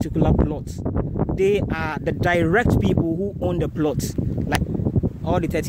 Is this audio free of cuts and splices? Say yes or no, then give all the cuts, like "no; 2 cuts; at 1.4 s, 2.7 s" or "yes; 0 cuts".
no; 1 cut; at 4.6 s